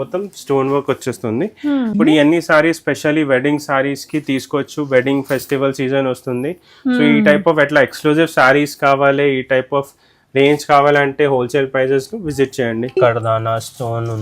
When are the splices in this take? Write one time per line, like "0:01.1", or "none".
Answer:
0:01.9
0:13.0

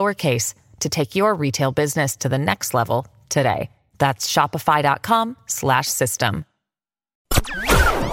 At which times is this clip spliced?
0:07.2

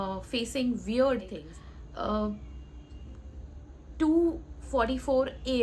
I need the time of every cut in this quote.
0:01.5

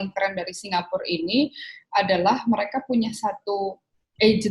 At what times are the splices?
none

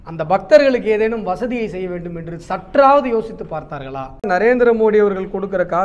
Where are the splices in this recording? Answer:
0:04.3

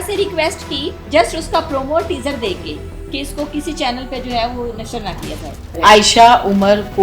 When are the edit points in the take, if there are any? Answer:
0:00.9
0:05.7

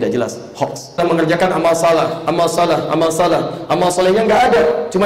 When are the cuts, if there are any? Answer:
0:01.0

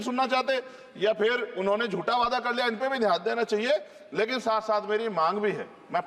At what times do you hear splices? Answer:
none

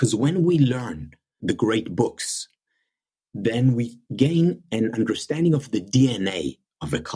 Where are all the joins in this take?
0:01.4
0:04.0

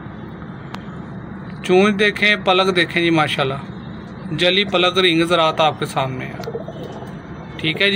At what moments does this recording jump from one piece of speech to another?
none

